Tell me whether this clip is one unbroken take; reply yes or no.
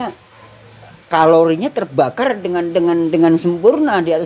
yes